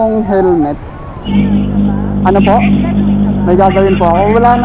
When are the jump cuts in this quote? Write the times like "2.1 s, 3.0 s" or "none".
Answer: 1.2 s